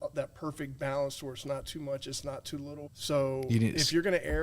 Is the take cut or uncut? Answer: cut